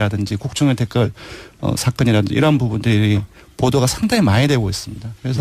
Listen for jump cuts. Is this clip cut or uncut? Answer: cut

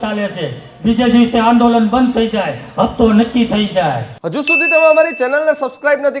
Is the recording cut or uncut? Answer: cut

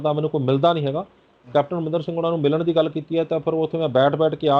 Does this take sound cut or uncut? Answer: uncut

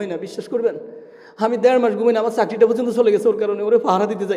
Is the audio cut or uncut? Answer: uncut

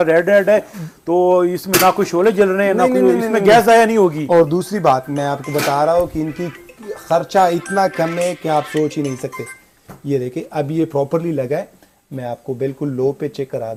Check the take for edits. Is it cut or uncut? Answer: uncut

